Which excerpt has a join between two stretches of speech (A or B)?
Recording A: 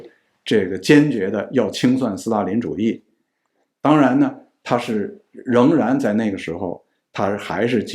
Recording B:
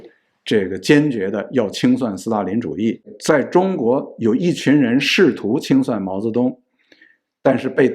B